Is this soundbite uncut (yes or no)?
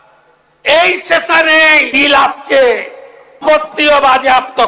no